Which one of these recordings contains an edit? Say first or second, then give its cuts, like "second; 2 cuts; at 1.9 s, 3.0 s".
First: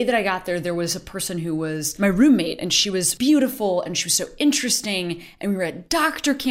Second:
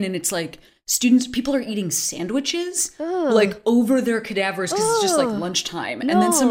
first; 2 cuts; at 1.9 s, 3.1 s